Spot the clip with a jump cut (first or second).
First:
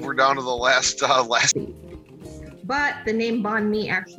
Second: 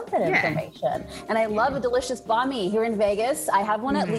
first